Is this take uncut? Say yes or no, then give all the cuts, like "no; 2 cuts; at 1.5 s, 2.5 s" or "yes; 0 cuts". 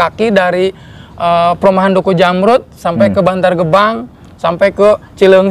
yes; 0 cuts